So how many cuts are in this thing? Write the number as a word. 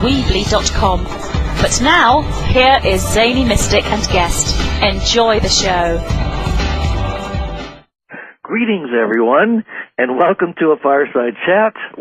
one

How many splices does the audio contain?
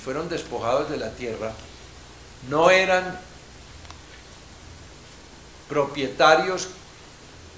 one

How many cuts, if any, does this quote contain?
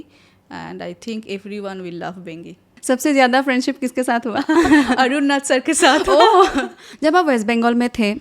two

